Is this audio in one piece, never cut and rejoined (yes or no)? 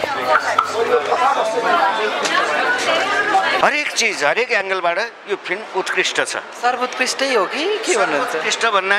no